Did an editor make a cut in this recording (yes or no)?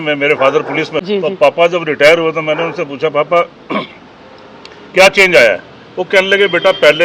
yes